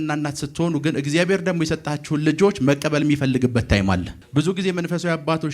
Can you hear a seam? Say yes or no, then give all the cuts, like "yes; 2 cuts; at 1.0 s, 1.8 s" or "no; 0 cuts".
yes; 1 cut; at 4.2 s